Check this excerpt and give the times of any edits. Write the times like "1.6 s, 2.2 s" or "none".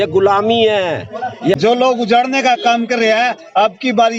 1.6 s